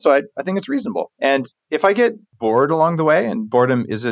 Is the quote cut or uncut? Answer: cut